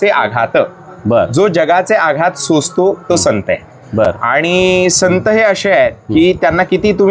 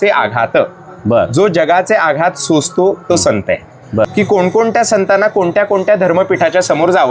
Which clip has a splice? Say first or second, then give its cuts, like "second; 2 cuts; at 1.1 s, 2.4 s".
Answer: second; 1 cut; at 4.1 s